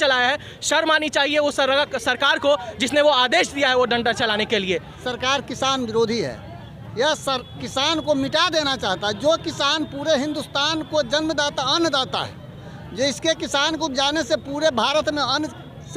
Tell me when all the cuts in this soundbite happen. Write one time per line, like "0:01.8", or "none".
0:05.0